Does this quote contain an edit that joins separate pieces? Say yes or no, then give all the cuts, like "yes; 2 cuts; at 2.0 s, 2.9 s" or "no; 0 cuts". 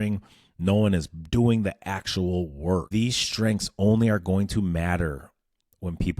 yes; 1 cut; at 2.9 s